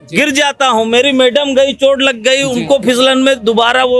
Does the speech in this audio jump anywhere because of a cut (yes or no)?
no